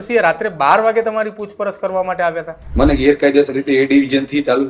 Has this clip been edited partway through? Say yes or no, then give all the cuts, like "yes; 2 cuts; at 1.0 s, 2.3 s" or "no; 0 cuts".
yes; 1 cut; at 2.6 s